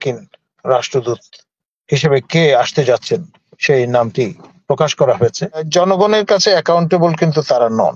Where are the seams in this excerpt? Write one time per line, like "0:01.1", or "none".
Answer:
0:05.6